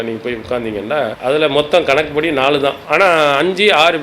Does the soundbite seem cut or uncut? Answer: cut